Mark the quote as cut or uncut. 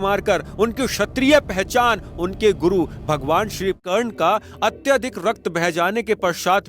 cut